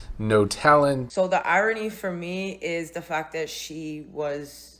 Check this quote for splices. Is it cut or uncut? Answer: cut